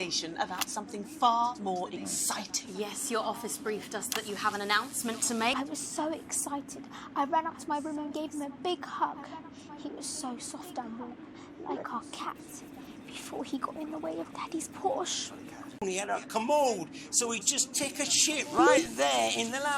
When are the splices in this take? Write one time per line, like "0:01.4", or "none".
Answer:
0:05.5
0:15.8

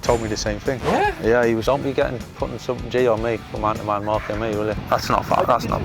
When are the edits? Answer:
0:01.6
0:04.8

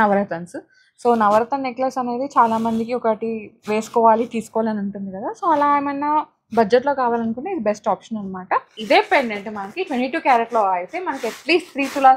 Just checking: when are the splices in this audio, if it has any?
0:08.7

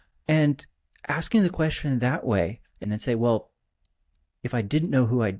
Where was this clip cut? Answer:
0:02.8

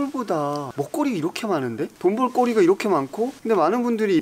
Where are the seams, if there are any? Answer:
0:01.9
0:03.4

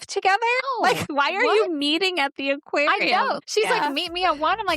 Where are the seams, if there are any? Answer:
0:01.0
0:03.4

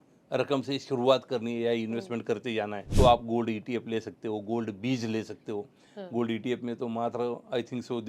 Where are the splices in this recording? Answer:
0:02.8

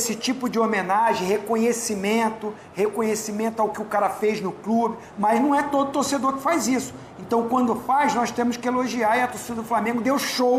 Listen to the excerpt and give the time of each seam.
0:05.0

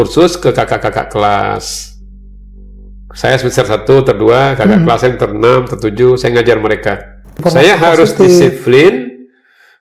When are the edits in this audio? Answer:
0:07.4

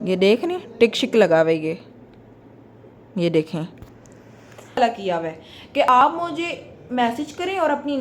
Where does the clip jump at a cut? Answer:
0:04.8

